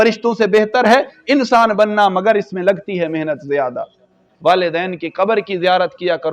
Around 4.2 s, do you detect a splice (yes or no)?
yes